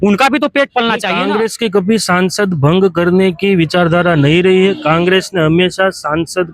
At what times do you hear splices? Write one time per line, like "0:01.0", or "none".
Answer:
0:01.1